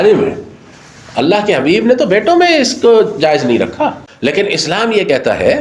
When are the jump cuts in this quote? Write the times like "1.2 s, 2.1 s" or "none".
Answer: 4.1 s